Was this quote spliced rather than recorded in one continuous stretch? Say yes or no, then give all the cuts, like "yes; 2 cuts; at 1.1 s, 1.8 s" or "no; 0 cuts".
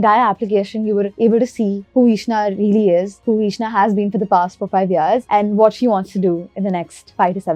no; 0 cuts